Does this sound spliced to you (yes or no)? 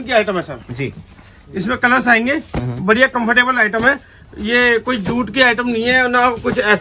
no